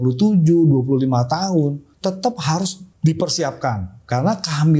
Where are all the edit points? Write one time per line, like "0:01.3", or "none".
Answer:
0:01.9
0:02.8